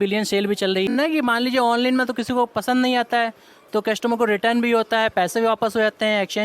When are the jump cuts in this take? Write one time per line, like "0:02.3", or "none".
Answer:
0:00.9

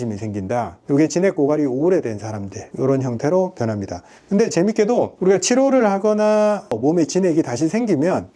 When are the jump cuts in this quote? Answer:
0:06.7

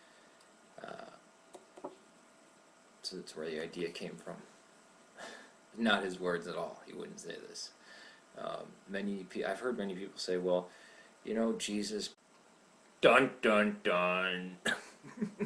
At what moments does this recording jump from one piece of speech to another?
none

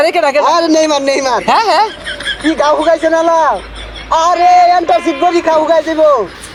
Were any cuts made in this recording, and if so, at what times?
none

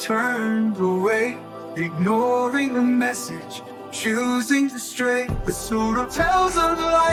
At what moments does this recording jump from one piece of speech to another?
none

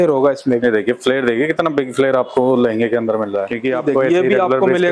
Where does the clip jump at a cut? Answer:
0:03.5

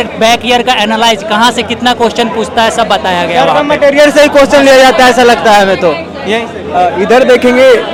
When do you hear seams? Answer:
none

